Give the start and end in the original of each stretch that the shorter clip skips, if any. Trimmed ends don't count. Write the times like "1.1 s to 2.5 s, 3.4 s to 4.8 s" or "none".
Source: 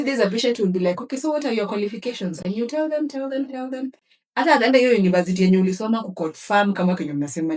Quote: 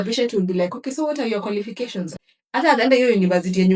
2.4 s to 4.0 s